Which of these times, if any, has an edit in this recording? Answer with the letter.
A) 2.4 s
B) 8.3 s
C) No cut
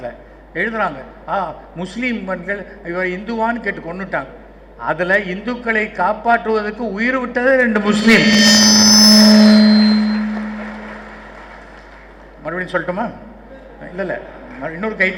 C